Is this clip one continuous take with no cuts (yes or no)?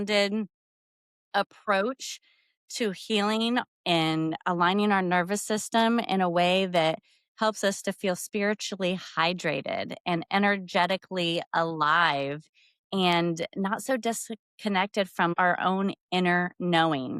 no